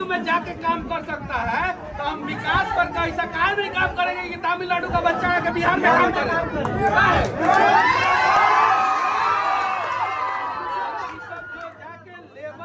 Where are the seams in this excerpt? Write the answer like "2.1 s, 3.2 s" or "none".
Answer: none